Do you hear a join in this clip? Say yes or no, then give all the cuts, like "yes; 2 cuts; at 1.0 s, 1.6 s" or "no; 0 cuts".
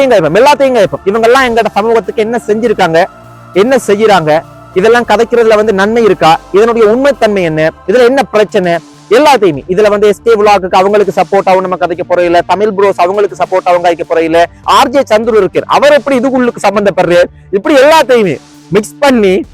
no; 0 cuts